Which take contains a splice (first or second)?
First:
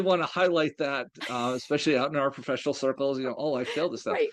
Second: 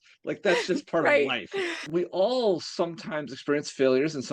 second